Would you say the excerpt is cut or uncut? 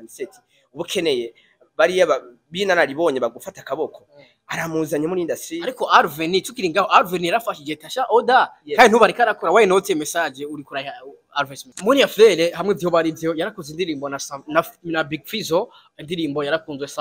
cut